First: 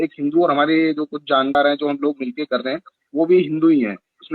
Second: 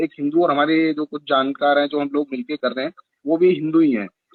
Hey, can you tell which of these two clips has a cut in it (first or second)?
first